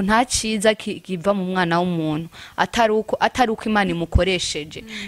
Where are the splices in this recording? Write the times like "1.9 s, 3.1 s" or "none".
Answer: none